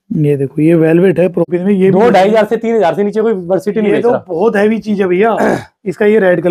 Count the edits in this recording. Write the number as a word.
one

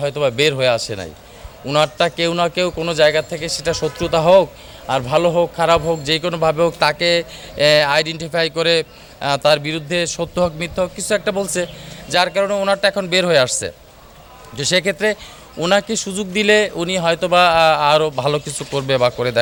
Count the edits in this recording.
zero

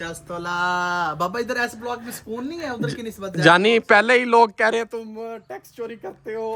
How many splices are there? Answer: zero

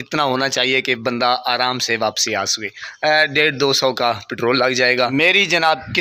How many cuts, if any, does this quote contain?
one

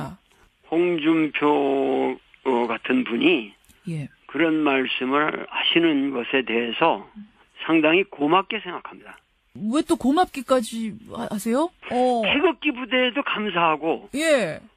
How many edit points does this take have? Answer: one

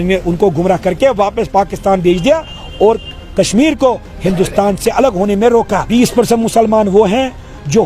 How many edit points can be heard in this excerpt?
one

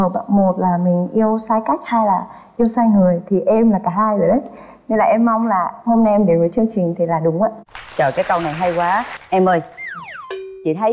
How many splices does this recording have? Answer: one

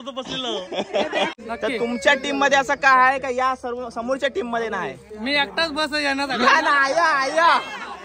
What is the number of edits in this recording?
one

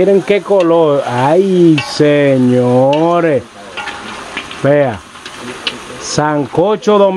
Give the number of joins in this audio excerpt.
zero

